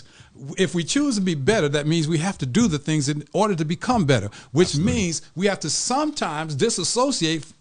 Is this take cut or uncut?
uncut